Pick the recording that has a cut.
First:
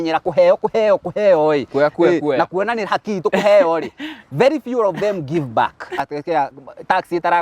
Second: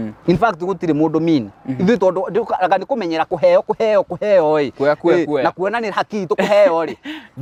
first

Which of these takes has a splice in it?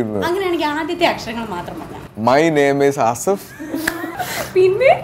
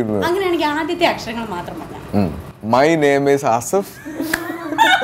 first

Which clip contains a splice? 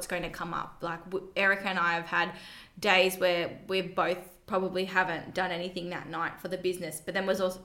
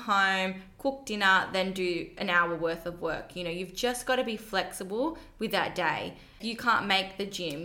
second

